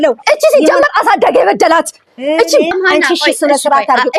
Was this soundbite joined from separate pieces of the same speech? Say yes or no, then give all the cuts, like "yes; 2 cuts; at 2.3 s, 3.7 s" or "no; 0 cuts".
yes; 1 cut; at 2.7 s